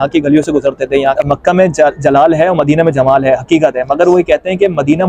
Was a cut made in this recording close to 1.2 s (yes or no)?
yes